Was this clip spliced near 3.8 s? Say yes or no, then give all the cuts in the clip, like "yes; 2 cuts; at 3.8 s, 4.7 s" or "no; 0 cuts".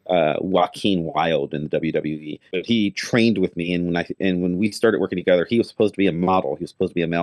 no; 1 cut; at 2.5 s